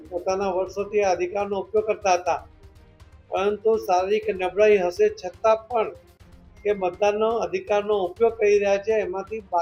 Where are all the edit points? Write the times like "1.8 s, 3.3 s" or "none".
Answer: none